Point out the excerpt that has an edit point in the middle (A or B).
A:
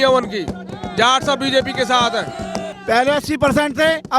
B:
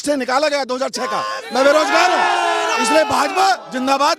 A